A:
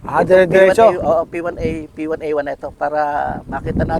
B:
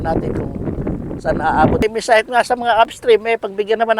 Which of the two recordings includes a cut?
B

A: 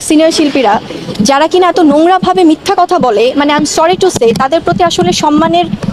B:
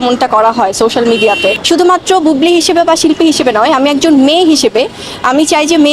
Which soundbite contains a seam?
B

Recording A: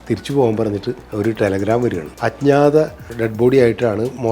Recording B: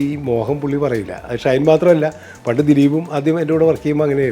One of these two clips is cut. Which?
A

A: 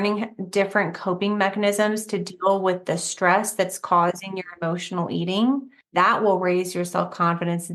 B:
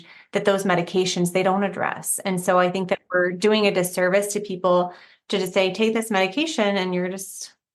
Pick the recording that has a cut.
A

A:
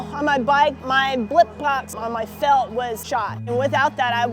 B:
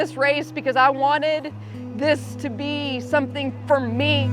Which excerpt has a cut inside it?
A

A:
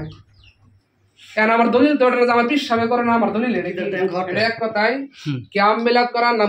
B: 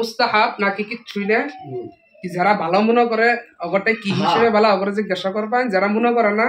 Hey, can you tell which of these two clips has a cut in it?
A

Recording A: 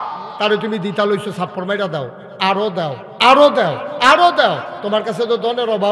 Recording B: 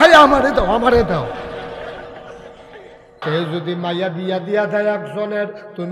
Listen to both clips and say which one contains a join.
B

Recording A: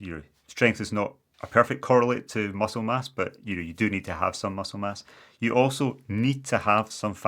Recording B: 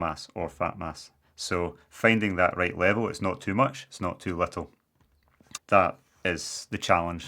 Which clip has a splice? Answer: B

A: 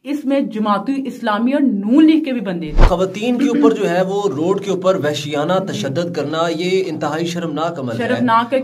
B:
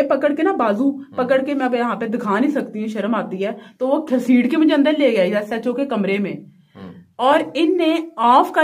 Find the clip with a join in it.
A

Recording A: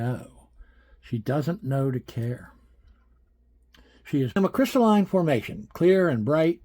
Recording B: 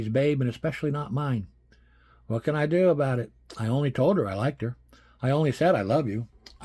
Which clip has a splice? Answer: A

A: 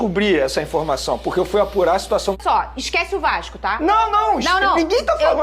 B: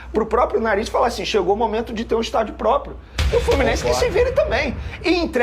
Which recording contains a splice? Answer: A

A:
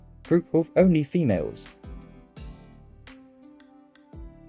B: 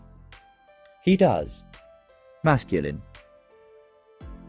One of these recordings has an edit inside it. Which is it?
B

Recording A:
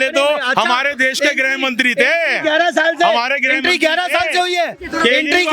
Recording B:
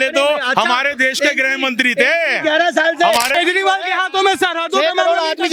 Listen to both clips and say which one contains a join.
B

